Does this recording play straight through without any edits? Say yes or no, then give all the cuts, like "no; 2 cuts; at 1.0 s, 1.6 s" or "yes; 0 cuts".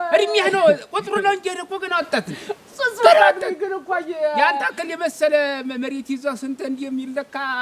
yes; 0 cuts